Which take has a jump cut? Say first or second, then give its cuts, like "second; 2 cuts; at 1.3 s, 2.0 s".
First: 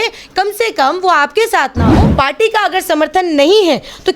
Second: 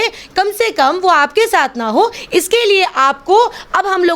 first; 1 cut; at 1.9 s